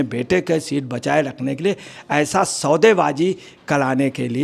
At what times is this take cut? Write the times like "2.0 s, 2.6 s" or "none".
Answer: none